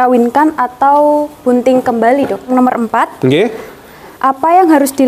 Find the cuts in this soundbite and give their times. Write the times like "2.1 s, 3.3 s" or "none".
2.5 s